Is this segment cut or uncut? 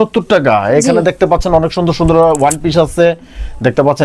uncut